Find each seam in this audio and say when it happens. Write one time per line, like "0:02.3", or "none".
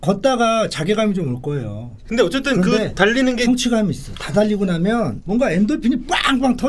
0:05.2

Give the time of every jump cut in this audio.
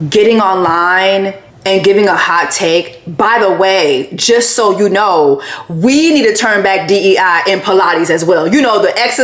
0:01.5

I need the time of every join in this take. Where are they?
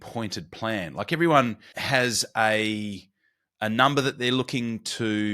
0:01.7

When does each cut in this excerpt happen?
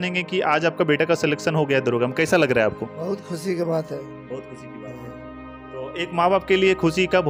none

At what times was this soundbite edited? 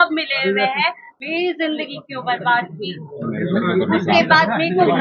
0:01.1

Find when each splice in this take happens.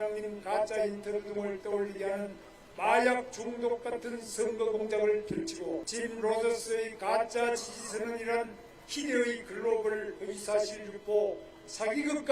0:05.9

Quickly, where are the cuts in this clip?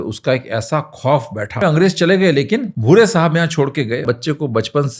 0:01.6
0:02.7
0:04.0

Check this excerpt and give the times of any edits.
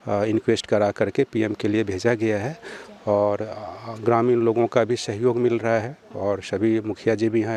none

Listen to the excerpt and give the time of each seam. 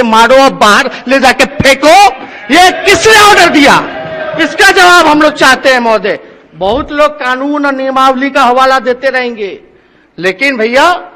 none

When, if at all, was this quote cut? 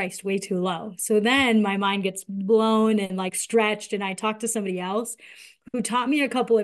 none

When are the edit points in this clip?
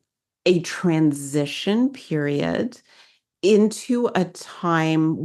0:03.2

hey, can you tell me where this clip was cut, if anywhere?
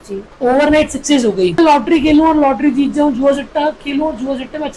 0:01.6

